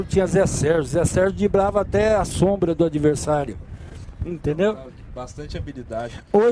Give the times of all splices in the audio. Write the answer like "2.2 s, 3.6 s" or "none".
none